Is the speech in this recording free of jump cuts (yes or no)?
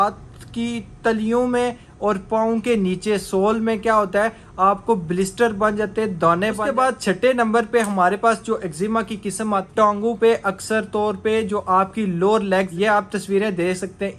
no